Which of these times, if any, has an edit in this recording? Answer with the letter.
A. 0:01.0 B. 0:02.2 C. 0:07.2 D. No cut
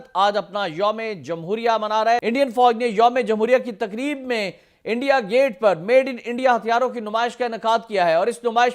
B